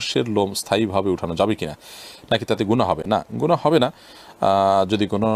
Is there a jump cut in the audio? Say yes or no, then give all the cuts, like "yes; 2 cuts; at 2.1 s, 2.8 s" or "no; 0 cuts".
no; 0 cuts